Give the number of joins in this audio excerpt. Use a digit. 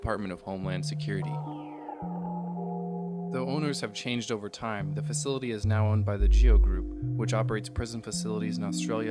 1